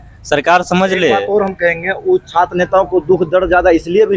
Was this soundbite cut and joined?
no; 0 cuts

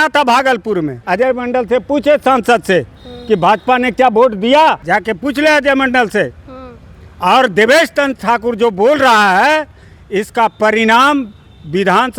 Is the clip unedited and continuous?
no; 2 cuts; at 1.0 s, 4.8 s

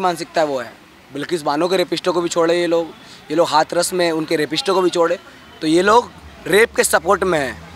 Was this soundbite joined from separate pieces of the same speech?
no; 0 cuts

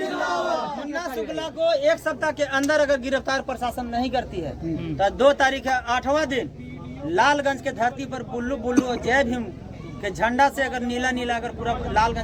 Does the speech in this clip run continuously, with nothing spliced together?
yes; 0 cuts

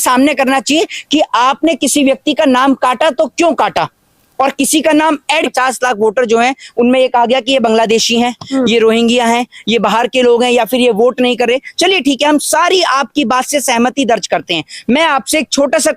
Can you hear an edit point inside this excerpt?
yes; 1 cut; at 5.5 s

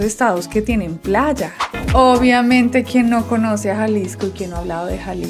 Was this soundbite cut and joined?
yes; 1 cut; at 1.7 s

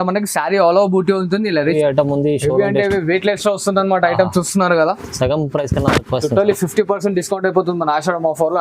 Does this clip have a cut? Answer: yes; 1 cut; at 1.7 s

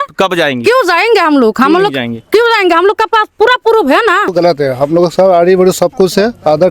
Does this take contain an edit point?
yes; 1 cut; at 4.3 s

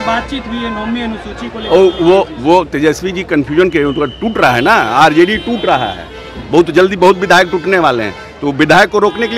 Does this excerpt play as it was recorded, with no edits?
yes; 0 cuts

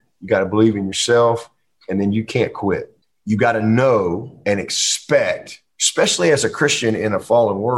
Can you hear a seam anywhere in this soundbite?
no; 0 cuts

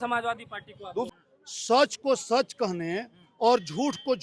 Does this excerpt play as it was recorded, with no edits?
no; 1 cut; at 1.1 s

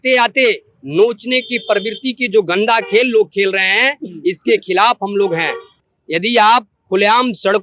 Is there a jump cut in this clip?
yes; 1 cut; at 5.8 s

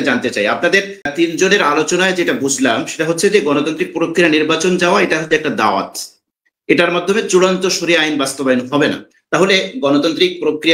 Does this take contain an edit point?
yes; 1 cut; at 1.1 s

